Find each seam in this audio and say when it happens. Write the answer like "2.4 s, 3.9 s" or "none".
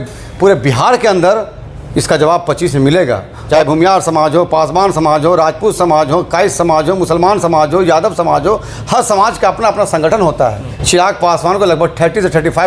3.4 s, 10.7 s

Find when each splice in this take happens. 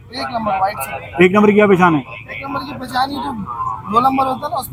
none

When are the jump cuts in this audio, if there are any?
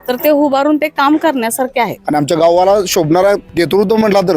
2.0 s, 3.5 s

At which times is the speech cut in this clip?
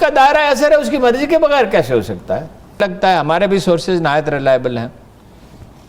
2.8 s

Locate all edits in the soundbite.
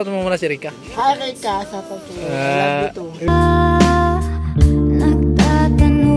1.9 s, 3.3 s

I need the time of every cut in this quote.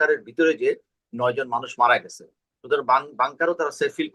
none

